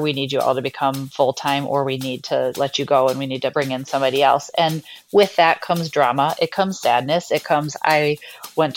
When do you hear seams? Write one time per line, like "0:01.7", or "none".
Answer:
0:01.0
0:02.5
0:03.5